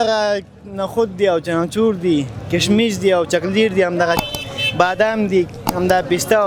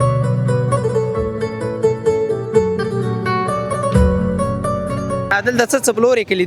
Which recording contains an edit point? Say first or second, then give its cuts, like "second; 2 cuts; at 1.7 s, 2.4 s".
second; 1 cut; at 5.3 s